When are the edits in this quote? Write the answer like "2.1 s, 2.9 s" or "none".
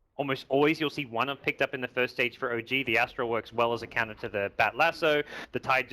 2.2 s